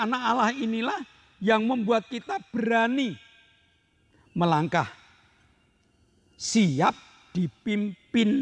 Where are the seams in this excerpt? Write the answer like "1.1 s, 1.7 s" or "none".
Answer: none